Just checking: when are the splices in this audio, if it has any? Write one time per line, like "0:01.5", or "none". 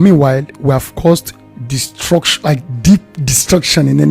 0:00.9